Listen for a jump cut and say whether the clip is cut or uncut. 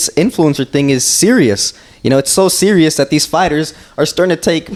uncut